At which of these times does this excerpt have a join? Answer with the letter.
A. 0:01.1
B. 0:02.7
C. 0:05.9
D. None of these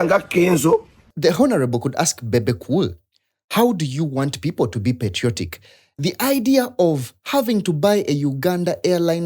A